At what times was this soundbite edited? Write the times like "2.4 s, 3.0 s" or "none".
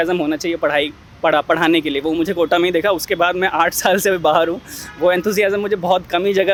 none